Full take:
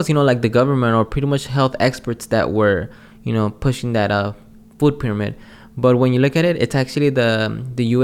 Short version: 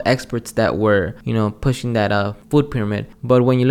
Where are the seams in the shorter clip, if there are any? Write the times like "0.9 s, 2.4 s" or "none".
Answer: 1.2 s, 2.8 s